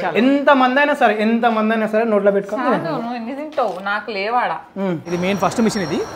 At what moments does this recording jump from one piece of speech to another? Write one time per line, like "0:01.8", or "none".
0:05.1